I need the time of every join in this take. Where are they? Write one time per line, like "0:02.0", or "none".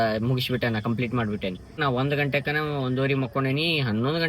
0:01.8